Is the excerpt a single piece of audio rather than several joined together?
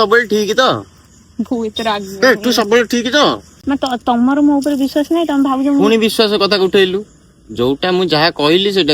no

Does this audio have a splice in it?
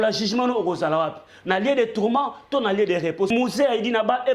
yes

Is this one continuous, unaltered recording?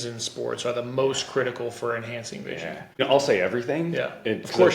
no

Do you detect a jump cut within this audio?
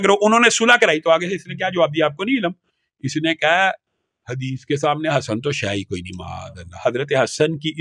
no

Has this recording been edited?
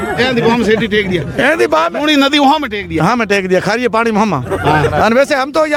no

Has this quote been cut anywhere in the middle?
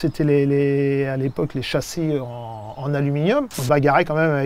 yes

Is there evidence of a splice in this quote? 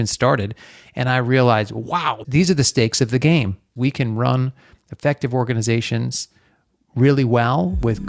yes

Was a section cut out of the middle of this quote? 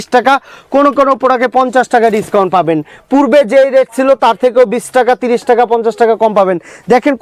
no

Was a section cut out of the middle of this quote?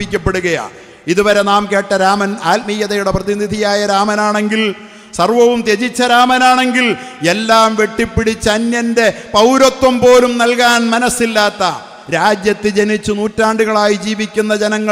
no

